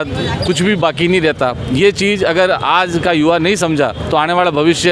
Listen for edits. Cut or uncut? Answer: uncut